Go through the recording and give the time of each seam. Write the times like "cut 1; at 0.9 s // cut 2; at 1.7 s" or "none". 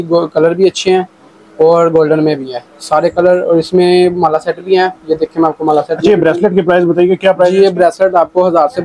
none